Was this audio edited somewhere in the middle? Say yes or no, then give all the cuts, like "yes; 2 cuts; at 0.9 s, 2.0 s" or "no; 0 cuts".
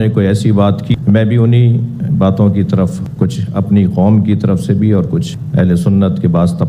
yes; 1 cut; at 1.0 s